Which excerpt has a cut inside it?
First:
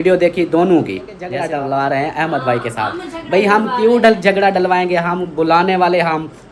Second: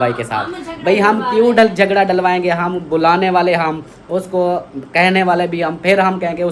first; 1 cut; at 1.2 s

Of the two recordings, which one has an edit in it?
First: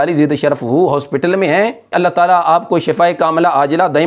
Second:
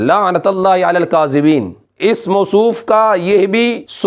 first; 1 cut; at 1.9 s

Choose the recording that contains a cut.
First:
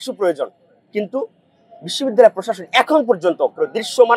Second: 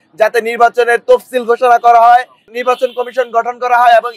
second; 1 cut; at 2.4 s

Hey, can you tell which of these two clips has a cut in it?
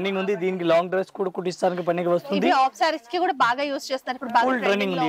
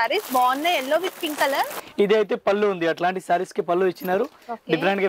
second; 1 cut; at 1.8 s

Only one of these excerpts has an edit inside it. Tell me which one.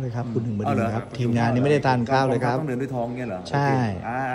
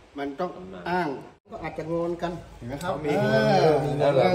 second; 1 cut; at 1.6 s

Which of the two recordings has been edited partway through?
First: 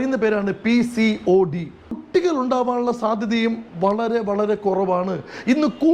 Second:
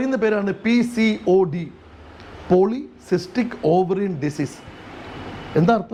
first; 1 cut; at 2.0 s

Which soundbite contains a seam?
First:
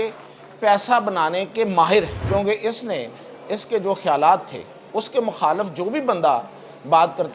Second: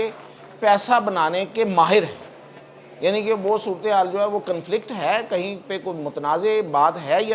first; 1 cut; at 2.2 s

